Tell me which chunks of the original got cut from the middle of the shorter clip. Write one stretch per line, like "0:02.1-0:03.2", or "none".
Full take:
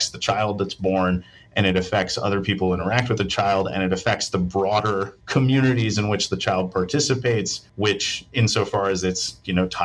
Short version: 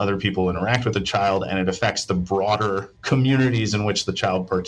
none